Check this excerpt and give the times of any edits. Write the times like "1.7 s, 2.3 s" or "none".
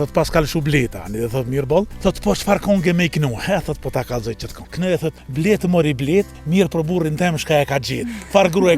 1.9 s, 5.0 s, 6.4 s